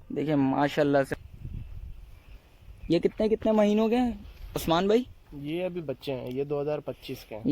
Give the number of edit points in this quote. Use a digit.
1